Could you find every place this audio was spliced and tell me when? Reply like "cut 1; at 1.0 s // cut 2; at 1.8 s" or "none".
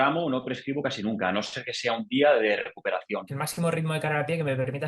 cut 1; at 3.4 s